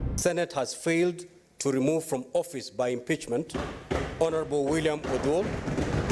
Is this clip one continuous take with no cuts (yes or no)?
yes